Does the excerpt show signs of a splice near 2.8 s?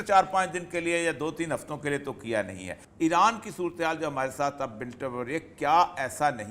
yes; 1 cut; at 2.8 s

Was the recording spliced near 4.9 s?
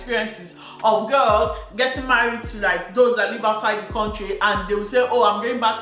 no; 0 cuts

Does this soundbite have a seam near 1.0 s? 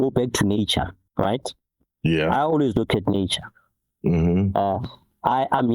yes; 1 cut; at 1.0 s

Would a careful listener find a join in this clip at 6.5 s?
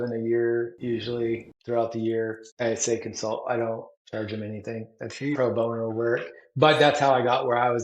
no; 3 cuts; at 1.0 s, 2.4 s, 4.0 s

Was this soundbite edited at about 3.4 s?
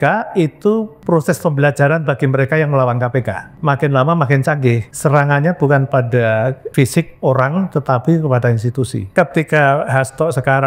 yes; 5 cuts; at 0.9 s, 3.4 s, 4.9 s, 6.6 s, 9.1 s

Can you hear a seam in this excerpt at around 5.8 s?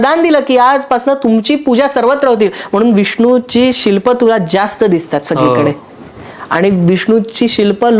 no; 0 cuts

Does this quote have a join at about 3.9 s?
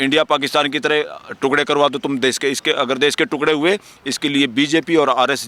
no; 0 cuts

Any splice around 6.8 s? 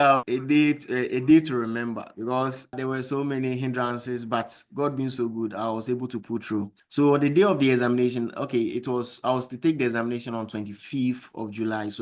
yes; 1 cut; at 6.8 s

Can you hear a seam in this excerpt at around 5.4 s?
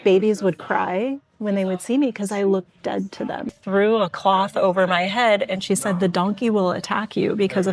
no; 1 cut; at 3.6 s

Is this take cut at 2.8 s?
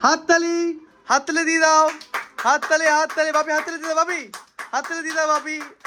no; 0 cuts

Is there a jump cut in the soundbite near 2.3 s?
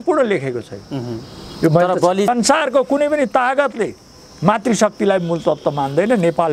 yes; 1 cut; at 2.3 s

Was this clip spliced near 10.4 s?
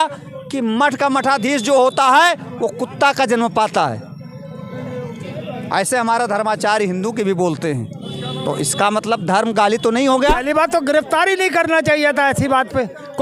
yes; 1 cut; at 10.4 s

